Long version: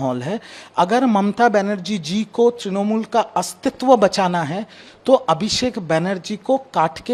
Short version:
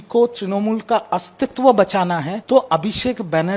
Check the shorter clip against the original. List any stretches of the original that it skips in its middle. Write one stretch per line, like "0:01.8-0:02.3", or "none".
0:04.6-0:04.9